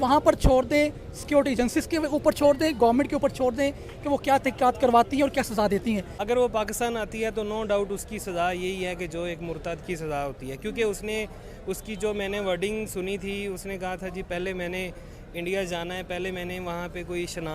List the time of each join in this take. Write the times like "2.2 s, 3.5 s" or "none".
6.1 s